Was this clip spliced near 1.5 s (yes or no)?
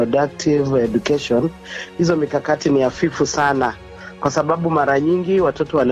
no